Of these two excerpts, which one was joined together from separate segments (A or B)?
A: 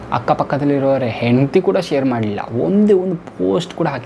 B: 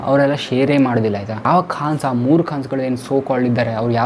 B